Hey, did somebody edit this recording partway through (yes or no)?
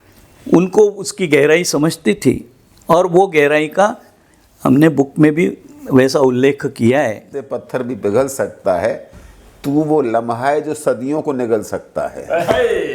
yes